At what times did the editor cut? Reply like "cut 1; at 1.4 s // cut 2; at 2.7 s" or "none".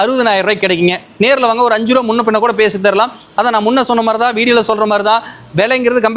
none